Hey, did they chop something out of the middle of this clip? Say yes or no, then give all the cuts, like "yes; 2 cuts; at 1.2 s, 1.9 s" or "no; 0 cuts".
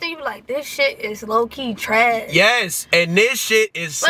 no; 0 cuts